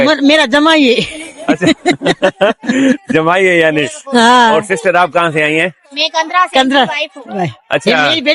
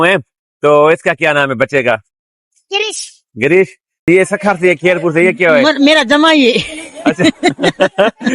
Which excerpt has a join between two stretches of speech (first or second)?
second